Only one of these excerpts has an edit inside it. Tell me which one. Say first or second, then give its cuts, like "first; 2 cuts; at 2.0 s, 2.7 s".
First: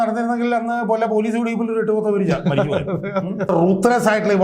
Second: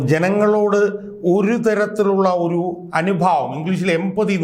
first; 1 cut; at 3.5 s